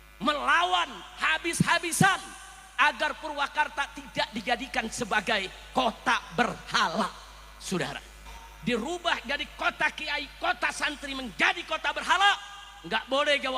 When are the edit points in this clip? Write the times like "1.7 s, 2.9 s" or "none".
8.4 s